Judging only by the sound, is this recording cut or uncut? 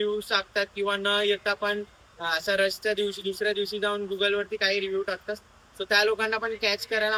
uncut